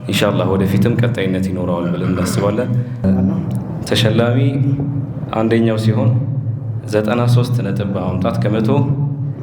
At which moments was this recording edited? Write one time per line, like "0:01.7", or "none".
0:03.0